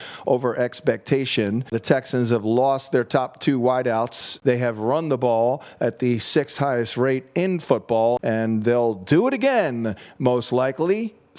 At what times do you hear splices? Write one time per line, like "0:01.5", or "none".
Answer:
0:01.7
0:04.2
0:08.2